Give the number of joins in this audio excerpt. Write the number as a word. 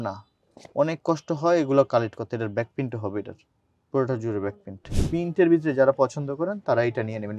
one